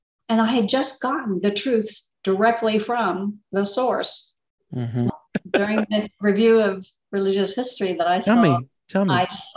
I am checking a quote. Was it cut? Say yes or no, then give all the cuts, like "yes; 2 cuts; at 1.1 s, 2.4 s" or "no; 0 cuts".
yes; 1 cut; at 5.1 s